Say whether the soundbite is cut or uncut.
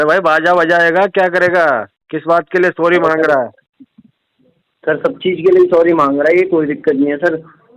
uncut